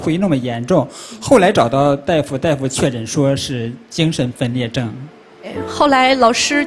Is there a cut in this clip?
yes; 1 cut; at 5.6 s

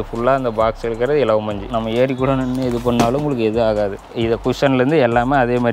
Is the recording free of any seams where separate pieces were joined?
no; 2 cuts; at 1.6 s, 4.0 s

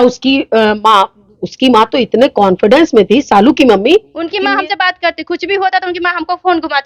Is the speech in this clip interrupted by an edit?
yes; 1 cut; at 4.2 s

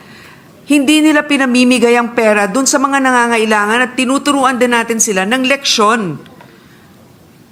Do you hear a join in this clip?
no; 0 cuts

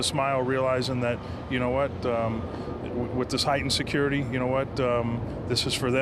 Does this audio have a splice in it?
no; 0 cuts

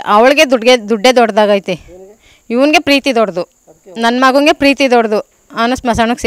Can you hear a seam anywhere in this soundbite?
no; 0 cuts

